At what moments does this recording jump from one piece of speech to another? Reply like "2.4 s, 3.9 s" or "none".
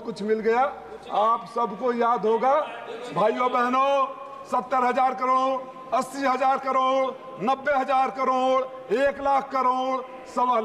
none